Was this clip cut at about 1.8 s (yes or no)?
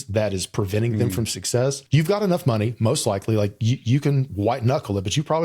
yes